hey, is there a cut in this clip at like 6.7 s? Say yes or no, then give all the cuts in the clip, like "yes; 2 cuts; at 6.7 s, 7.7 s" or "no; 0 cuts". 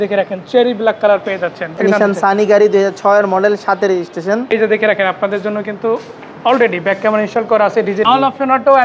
no; 3 cuts; at 1.8 s, 4.5 s, 8.0 s